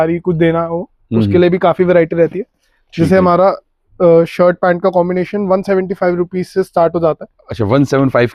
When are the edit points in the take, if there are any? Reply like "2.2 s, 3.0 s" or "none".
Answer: none